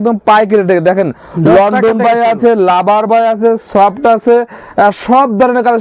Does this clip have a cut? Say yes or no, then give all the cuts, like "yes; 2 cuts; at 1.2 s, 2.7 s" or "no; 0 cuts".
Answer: no; 0 cuts